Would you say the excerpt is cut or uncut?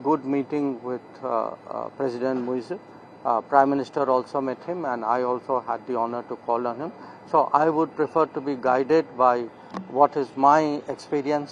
uncut